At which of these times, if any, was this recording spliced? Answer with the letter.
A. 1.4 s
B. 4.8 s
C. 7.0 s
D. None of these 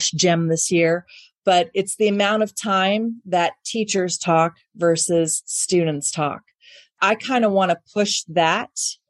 C